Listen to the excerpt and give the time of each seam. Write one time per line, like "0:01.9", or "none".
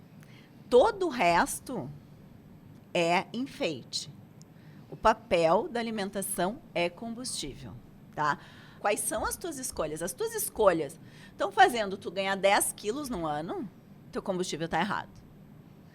0:08.7

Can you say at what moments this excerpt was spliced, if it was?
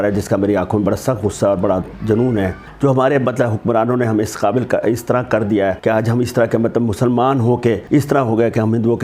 0:02.6
0:05.8
0:07.8

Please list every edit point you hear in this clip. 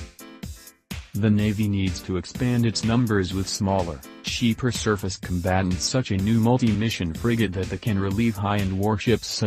0:01.0

